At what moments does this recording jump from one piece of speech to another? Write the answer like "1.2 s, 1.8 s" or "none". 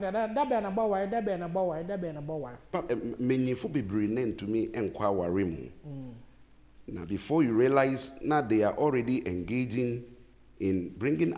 2.7 s